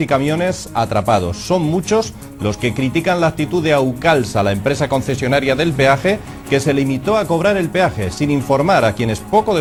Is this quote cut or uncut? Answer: uncut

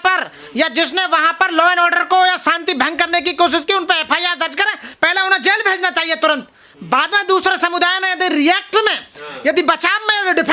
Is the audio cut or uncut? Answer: uncut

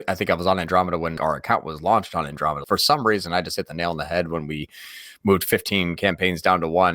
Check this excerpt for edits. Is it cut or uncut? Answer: cut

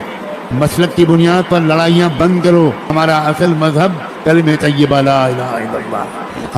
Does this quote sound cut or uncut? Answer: cut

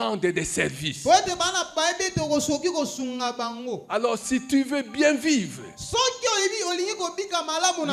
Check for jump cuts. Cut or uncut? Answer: uncut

